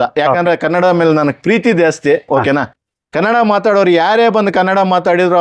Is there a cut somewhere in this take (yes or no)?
no